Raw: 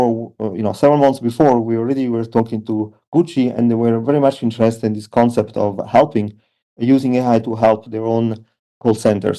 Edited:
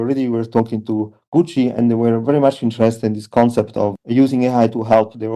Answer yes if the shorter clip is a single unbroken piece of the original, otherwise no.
no